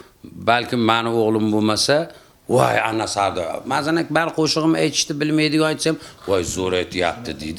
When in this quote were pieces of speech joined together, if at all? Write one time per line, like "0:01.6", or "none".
none